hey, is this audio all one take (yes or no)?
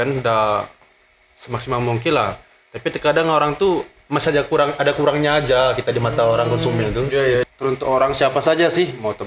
no